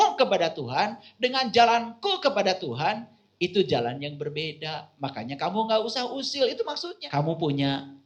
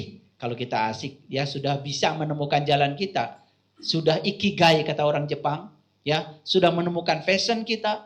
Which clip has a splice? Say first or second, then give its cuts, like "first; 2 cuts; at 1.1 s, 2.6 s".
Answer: first; 1 cut; at 6.9 s